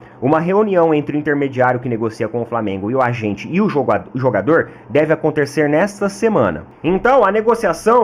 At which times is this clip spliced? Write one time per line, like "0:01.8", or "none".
0:06.7